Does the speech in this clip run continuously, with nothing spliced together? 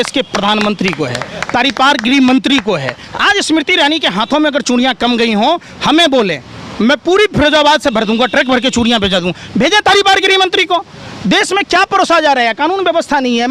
yes; 0 cuts

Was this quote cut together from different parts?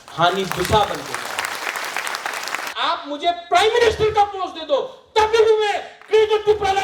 yes; 1 cut; at 2.7 s

